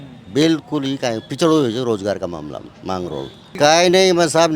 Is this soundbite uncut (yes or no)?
no